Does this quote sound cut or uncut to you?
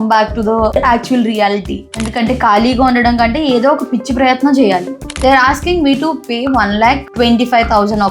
cut